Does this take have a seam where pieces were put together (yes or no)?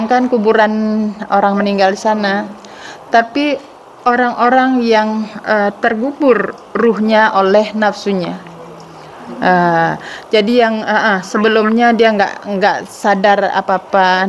no